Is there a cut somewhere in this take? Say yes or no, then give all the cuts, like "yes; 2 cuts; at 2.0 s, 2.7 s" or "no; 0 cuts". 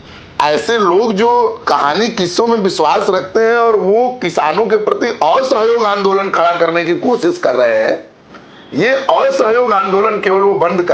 yes; 1 cut; at 1.6 s